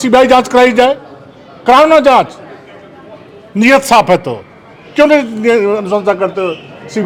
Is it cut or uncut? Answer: uncut